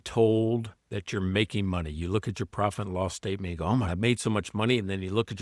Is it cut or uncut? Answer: cut